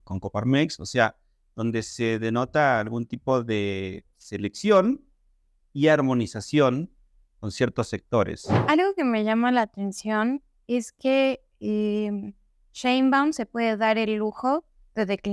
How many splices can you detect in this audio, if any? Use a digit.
1